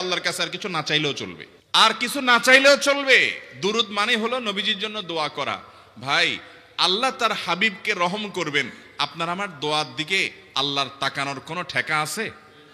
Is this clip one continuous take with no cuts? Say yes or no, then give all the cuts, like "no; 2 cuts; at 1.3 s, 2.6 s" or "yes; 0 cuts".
yes; 0 cuts